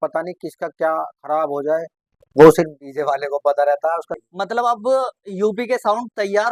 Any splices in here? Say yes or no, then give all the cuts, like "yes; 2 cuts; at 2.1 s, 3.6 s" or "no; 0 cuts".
yes; 1 cut; at 4.1 s